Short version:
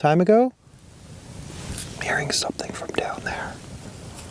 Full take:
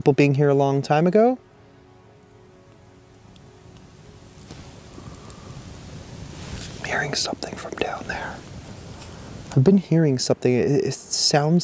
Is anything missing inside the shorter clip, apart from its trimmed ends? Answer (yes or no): yes